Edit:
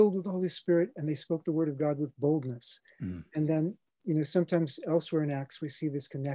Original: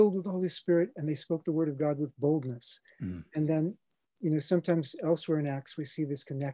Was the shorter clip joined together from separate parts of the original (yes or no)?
yes